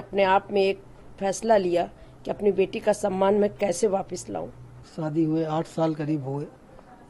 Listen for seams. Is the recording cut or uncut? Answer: cut